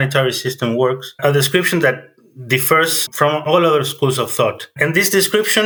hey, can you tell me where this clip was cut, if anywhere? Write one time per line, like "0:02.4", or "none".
none